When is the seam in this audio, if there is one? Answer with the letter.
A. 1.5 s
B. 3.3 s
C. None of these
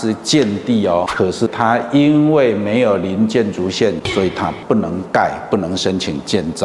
A